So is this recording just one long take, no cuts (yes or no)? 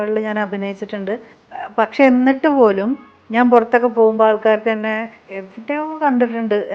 no